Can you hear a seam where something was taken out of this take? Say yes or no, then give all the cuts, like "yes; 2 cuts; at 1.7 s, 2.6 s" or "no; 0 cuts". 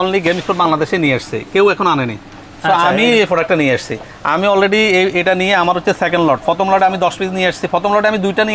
no; 0 cuts